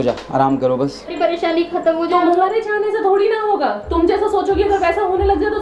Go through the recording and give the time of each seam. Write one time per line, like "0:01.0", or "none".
0:01.1

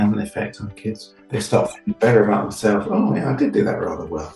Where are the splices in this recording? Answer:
0:01.1

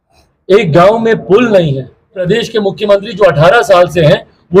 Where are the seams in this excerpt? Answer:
0:02.3

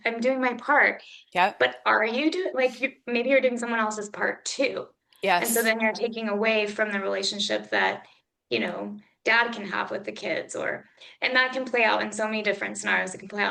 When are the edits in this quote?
none

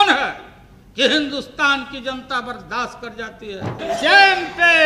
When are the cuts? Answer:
0:03.8

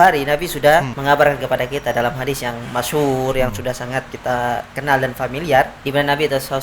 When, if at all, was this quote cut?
0:00.9
0:04.1
0:05.8

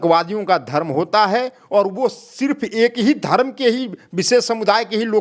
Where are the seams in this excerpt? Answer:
none

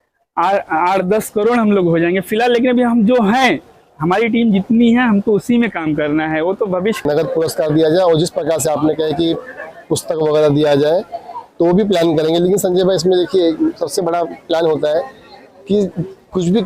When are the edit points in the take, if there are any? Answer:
0:07.0

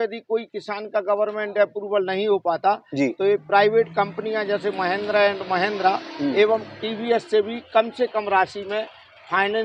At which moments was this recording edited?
none

